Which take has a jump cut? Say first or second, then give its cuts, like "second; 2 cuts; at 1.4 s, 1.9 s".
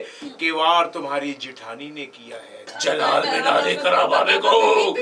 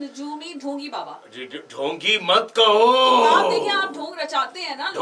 first; 1 cut; at 2.7 s